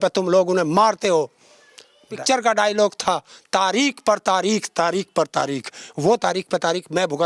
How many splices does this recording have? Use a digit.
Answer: 1